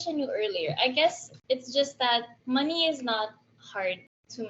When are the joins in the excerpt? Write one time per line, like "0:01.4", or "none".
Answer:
0:01.3
0:02.3